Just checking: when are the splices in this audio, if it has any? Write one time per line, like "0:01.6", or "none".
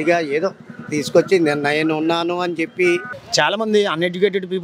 0:03.2